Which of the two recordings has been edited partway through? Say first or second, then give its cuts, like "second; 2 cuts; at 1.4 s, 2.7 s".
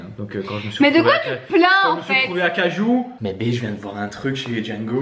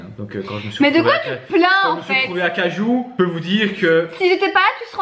first; 1 cut; at 3.1 s